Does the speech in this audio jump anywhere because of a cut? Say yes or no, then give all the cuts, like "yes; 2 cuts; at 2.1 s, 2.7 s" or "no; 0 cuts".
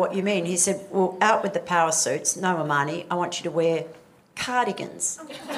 no; 0 cuts